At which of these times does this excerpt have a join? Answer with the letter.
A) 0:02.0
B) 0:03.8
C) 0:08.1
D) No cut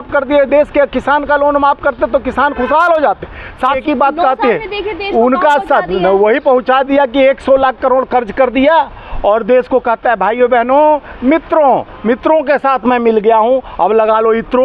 B